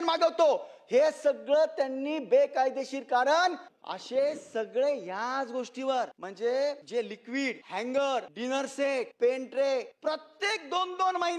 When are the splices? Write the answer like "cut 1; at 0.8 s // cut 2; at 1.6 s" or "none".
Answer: cut 1; at 3.7 s // cut 2; at 6.2 s // cut 3; at 7.2 s // cut 4; at 8.7 s // cut 5; at 9.9 s